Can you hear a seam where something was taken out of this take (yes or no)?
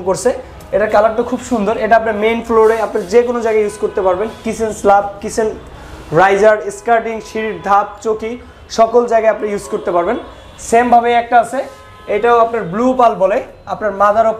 no